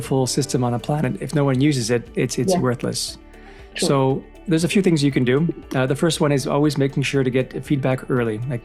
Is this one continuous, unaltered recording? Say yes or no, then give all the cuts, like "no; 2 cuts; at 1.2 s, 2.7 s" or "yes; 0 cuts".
yes; 0 cuts